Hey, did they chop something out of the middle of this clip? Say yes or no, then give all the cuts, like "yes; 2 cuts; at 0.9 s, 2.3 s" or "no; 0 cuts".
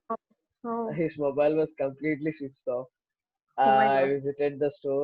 no; 0 cuts